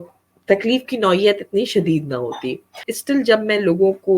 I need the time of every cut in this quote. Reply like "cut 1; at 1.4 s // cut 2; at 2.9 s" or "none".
cut 1; at 2.9 s